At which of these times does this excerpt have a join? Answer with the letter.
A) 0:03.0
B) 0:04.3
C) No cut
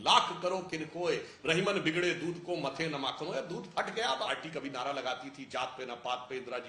B